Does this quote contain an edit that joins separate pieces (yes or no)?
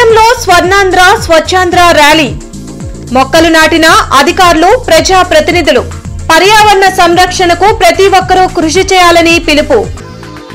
no